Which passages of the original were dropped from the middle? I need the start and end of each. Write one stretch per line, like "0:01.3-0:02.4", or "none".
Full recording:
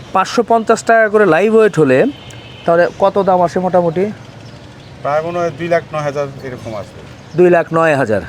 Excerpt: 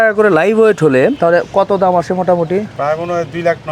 0:02.1-0:02.6
0:04.2-0:05.0